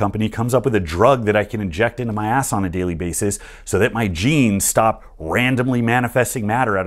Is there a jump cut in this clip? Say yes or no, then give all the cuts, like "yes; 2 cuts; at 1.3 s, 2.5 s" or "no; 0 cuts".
no; 0 cuts